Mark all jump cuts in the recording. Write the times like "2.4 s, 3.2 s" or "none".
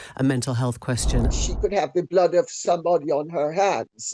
1.3 s